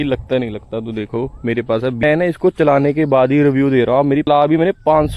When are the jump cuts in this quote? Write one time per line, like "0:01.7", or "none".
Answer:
0:02.0
0:04.3